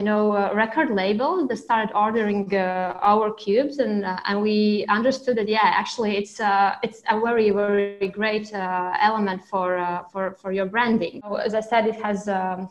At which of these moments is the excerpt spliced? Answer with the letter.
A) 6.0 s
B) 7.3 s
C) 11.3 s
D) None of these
C